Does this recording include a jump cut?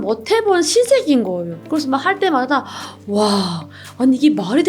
yes; 1 cut; at 1.5 s

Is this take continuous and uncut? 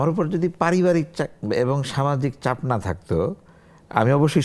yes; 0 cuts

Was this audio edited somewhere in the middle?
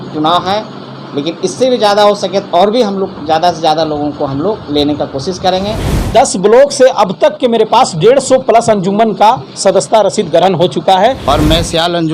yes; 2 cuts; at 5.8 s, 11.2 s

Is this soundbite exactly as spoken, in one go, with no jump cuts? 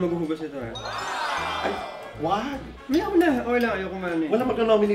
yes; 0 cuts

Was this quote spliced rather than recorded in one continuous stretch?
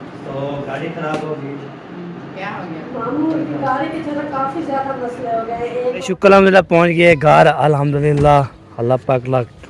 yes; 2 cuts; at 2.1 s, 6.0 s

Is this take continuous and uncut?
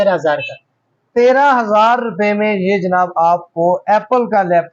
yes; 0 cuts

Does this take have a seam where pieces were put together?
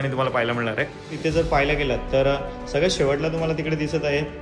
yes; 1 cut; at 1.2 s

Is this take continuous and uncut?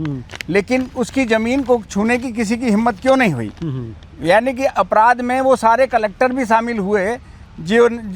yes; 0 cuts

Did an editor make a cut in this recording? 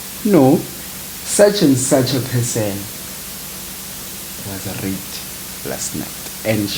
no; 0 cuts

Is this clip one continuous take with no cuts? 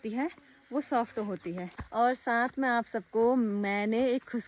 no; 1 cut; at 1.8 s

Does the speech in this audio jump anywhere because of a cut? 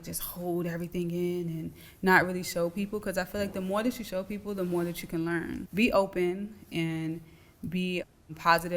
yes; 1 cut; at 5.6 s

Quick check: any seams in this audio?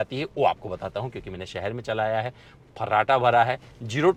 no; 0 cuts

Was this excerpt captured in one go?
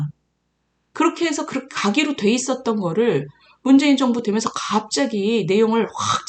yes; 0 cuts

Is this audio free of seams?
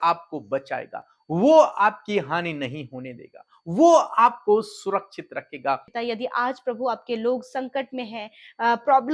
no; 1 cut; at 5.9 s

